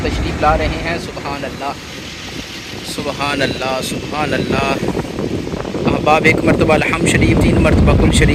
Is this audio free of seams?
yes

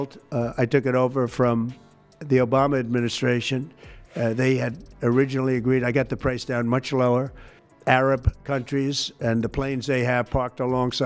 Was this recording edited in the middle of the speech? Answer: yes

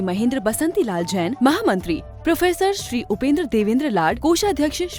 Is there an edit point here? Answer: no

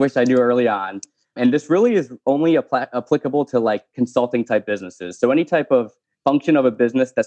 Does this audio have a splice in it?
yes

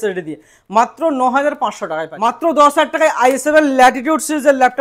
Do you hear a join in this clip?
yes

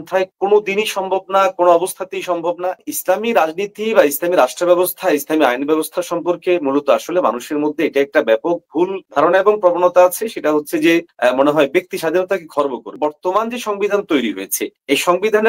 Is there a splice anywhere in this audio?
yes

